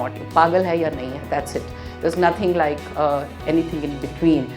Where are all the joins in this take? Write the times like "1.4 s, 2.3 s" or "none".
none